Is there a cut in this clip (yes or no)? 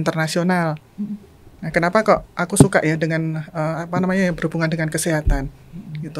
no